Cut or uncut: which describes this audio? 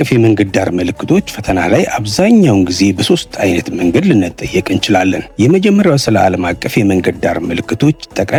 uncut